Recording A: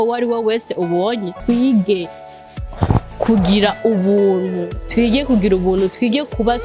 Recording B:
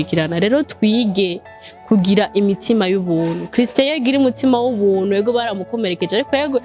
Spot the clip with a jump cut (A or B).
A